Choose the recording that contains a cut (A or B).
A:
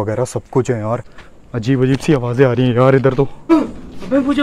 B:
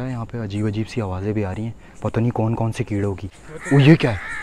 A